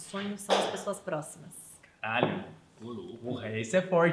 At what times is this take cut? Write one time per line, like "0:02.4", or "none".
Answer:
none

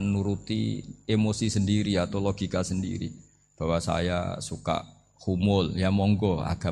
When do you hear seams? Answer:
none

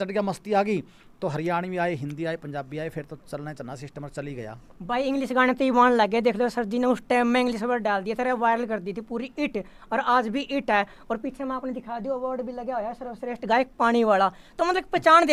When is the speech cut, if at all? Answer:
none

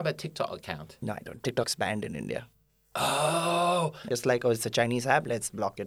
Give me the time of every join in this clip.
0:04.0

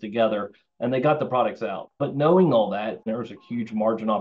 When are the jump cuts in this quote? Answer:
0:01.9
0:03.0

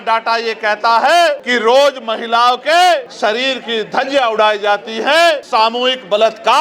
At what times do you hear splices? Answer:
0:01.5
0:03.1
0:05.4

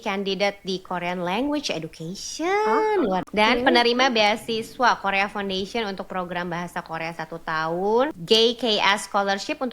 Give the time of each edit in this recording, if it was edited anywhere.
0:03.2
0:08.2

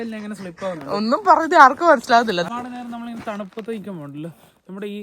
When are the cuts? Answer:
0:02.5

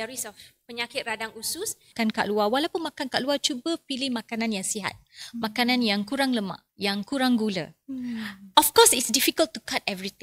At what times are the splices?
0:01.9
0:06.6

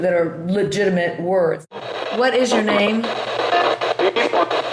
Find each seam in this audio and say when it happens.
0:01.7

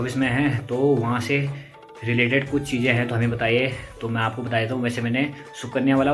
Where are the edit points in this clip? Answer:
none

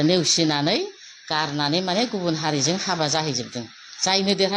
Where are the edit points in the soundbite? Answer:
none

